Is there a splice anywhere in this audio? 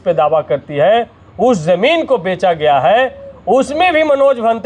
no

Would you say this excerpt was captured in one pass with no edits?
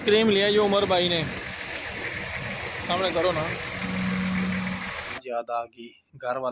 no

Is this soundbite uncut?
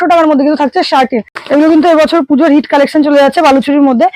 no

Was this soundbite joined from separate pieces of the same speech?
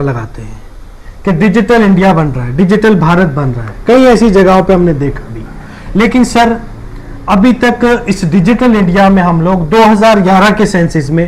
no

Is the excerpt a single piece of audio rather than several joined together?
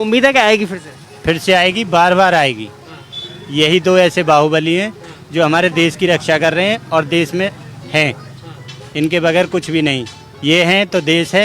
yes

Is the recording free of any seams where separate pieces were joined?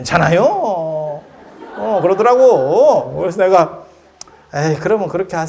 yes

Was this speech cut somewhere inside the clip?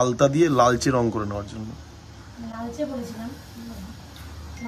no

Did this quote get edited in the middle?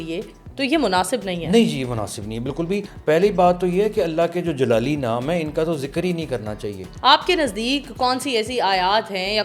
yes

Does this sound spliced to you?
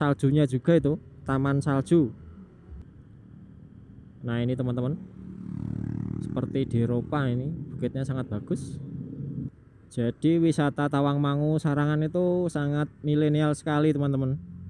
yes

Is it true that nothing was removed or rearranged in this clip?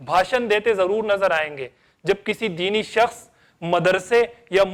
yes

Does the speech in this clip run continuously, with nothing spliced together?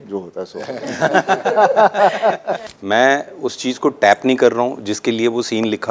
no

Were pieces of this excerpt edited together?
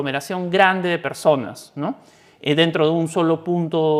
no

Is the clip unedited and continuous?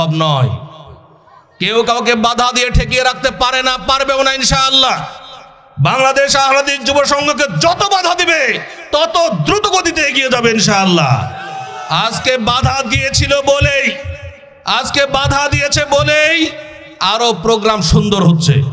yes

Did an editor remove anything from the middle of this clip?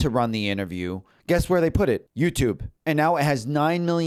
no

